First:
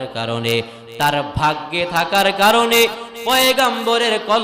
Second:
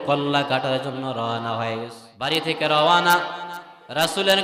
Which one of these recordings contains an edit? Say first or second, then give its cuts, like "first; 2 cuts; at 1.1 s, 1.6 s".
second; 1 cut; at 2.0 s